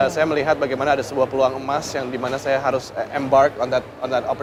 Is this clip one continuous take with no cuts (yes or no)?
yes